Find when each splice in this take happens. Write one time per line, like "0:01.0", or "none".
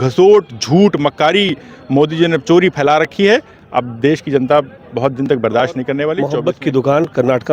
0:06.3